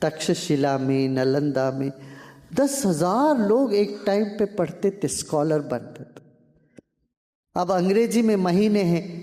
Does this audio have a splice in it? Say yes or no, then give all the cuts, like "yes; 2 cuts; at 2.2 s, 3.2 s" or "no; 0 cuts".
no; 0 cuts